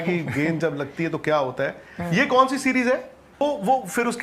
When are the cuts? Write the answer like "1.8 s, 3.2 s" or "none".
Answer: 3.2 s